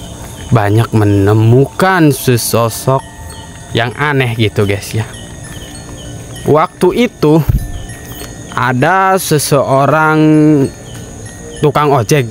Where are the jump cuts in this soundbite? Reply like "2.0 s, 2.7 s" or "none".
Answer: 5.6 s

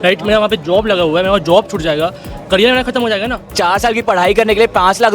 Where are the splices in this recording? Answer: 3.6 s

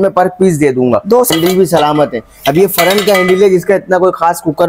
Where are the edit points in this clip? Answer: 1.3 s

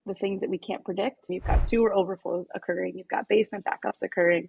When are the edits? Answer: 1.3 s

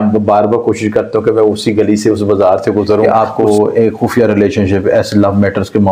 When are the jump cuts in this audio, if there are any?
3.1 s

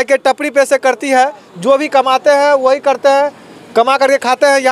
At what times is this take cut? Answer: none

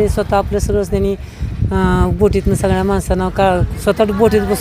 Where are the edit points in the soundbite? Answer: none

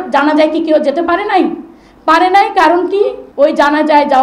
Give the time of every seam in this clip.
3.2 s

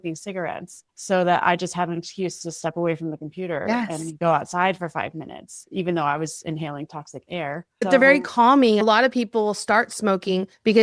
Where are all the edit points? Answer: none

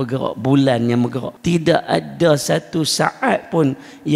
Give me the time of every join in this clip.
1.3 s

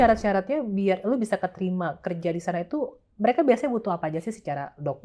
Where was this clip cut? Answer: none

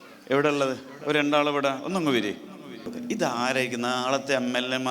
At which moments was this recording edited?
2.9 s

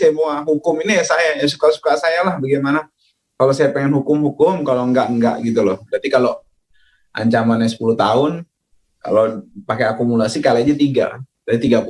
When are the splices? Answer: 5.9 s

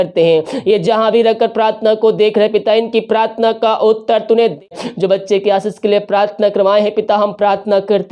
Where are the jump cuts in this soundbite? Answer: 4.6 s

